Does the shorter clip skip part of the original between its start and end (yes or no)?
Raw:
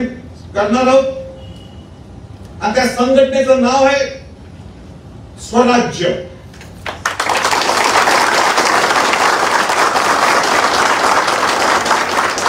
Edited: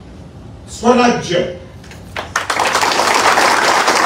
no